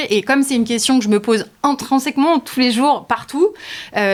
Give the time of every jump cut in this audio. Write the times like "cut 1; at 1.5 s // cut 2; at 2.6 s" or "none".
none